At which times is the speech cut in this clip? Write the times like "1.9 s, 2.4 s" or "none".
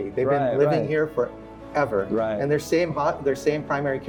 none